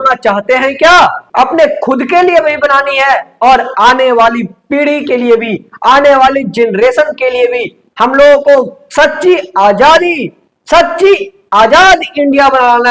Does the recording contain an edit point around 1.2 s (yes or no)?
yes